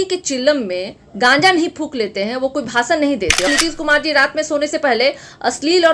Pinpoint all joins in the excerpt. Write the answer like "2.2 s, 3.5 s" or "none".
3.5 s